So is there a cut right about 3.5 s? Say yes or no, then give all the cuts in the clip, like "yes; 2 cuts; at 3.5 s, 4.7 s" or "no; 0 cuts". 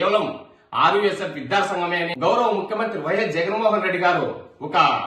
no; 1 cut; at 2.1 s